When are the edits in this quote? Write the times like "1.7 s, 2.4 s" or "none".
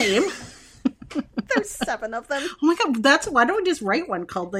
none